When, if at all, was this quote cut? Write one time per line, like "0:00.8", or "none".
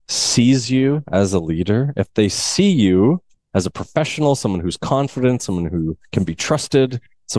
0:03.3